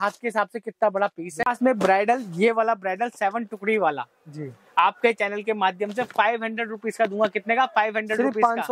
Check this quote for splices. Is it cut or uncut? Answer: cut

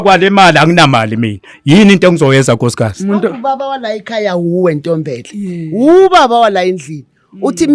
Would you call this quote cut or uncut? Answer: uncut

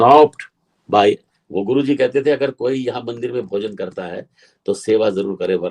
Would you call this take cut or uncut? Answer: cut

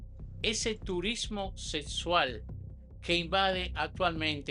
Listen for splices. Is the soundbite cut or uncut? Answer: uncut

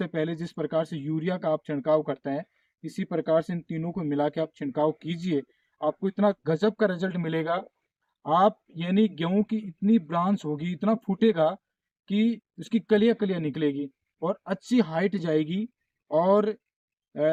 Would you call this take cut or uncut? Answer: uncut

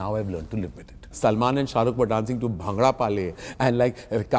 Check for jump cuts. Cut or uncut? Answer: cut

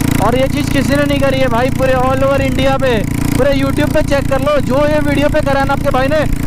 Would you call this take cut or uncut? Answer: uncut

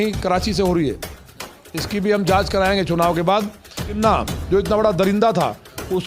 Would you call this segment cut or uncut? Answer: cut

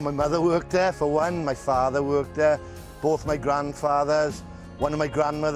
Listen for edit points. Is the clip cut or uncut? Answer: uncut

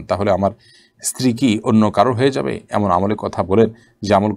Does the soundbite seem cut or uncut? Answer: uncut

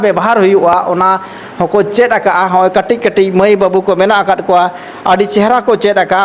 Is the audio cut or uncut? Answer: uncut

